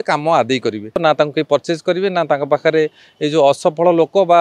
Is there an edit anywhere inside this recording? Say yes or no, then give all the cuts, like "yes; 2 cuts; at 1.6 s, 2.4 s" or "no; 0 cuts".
yes; 1 cut; at 1.0 s